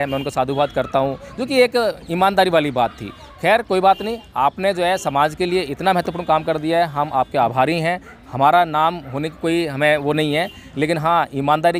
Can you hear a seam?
no; 0 cuts

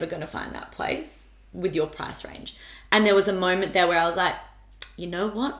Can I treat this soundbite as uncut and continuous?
yes; 0 cuts

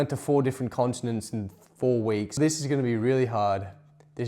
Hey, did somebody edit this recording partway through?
yes; 1 cut; at 2.4 s

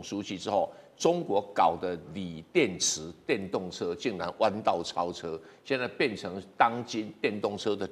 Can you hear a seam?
no; 0 cuts

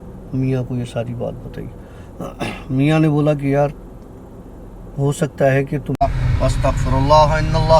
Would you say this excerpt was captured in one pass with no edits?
no; 1 cut; at 6.0 s

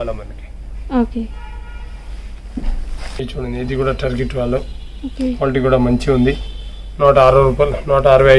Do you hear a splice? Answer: no; 0 cuts

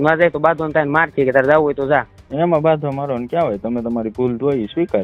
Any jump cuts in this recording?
no; 0 cuts

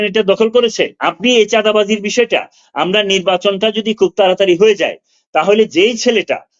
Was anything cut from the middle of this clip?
yes; 1 cut; at 1.0 s

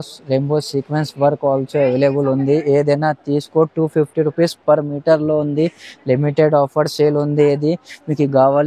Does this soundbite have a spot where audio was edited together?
no; 0 cuts

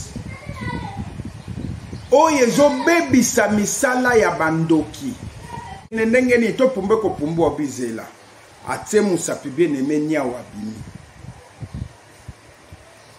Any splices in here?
yes; 1 cut; at 6.0 s

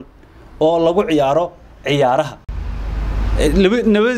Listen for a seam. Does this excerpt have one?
yes; 1 cut; at 2.5 s

